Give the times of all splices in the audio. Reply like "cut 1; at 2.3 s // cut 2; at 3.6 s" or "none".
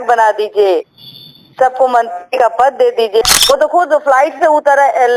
cut 1; at 3.2 s